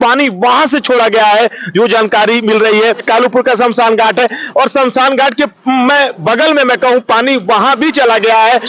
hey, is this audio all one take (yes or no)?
no